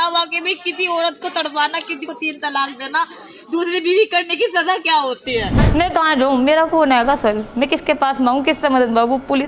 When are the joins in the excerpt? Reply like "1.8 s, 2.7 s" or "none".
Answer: 5.6 s